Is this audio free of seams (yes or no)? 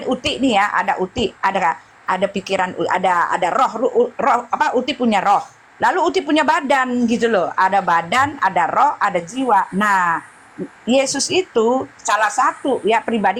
yes